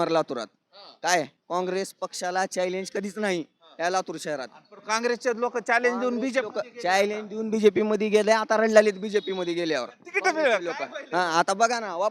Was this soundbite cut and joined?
no; 0 cuts

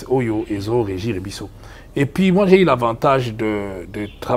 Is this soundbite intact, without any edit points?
yes; 0 cuts

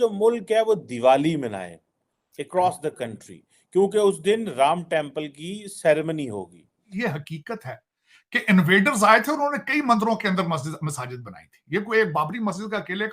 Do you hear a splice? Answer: yes; 1 cut; at 6.9 s

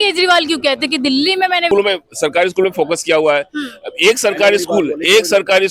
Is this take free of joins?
no; 1 cut; at 1.7 s

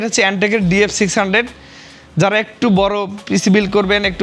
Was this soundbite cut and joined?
no; 0 cuts

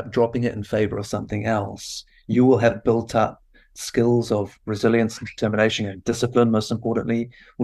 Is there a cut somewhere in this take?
no; 0 cuts

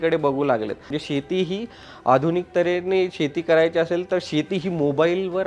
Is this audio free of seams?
no; 1 cut; at 0.9 s

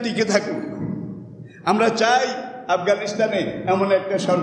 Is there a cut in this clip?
no; 0 cuts

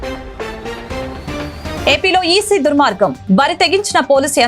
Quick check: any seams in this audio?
yes; 1 cut; at 1.8 s

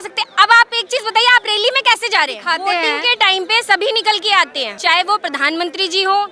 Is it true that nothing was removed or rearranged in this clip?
no; 2 cuts; at 2.4 s, 4.7 s

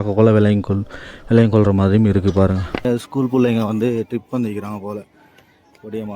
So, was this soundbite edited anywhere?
yes; 1 cut; at 2.8 s

